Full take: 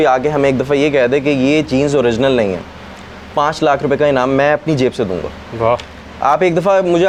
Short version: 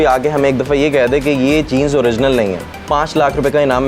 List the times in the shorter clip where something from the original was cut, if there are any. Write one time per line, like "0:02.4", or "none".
0:02.7